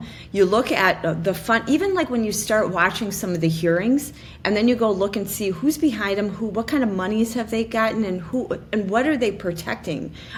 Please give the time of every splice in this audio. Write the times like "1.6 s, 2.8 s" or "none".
none